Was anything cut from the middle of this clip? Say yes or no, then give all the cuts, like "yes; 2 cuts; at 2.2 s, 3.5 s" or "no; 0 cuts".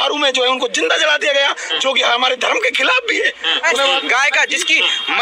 yes; 1 cut; at 3.7 s